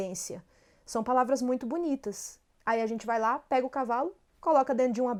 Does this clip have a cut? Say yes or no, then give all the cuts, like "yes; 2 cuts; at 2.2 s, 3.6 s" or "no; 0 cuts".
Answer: no; 0 cuts